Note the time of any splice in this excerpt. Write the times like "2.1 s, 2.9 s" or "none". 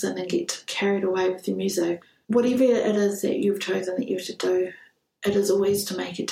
2.0 s